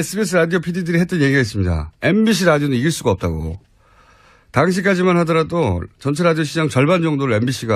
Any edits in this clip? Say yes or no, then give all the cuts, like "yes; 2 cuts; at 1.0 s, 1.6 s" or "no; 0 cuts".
no; 0 cuts